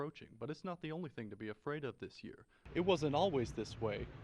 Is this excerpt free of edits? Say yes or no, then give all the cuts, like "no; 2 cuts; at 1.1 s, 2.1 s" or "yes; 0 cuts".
no; 1 cut; at 2.6 s